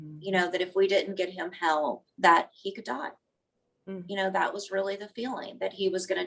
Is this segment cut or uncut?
uncut